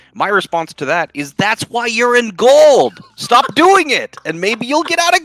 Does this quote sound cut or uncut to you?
uncut